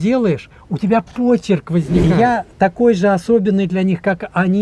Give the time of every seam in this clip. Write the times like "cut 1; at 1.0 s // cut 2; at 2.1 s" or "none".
cut 1; at 2.1 s